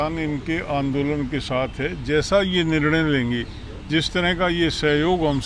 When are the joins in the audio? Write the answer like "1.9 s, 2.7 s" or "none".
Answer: none